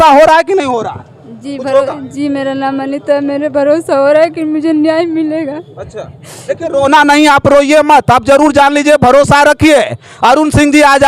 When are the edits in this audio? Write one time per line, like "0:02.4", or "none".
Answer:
none